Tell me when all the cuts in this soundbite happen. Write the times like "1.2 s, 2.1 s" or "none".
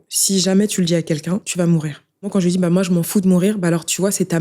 1.5 s, 2.3 s